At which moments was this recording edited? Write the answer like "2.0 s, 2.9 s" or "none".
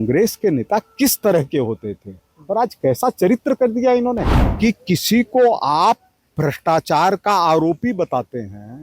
4.4 s